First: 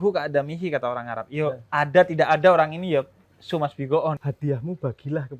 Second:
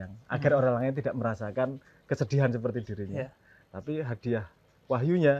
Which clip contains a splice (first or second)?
first